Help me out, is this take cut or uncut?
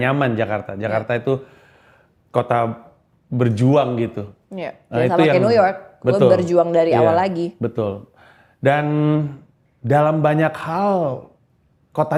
uncut